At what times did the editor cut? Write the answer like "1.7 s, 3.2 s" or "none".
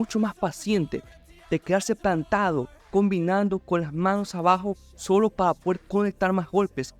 1.2 s